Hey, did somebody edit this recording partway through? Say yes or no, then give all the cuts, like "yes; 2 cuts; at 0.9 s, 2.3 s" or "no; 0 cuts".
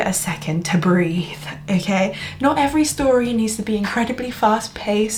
no; 0 cuts